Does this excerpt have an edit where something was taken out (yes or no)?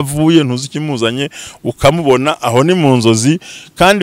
no